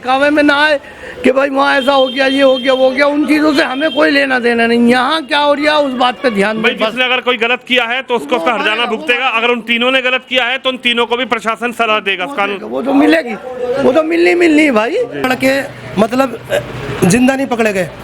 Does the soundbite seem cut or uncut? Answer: cut